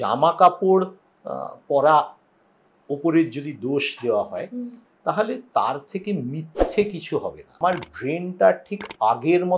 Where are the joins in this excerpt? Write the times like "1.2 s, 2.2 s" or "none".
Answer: 7.6 s